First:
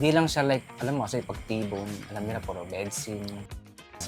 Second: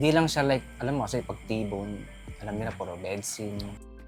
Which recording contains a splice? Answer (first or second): first